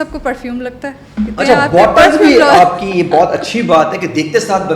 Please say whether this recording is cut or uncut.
uncut